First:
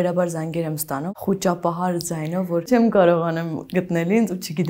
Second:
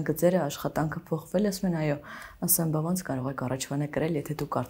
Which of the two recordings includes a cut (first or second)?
first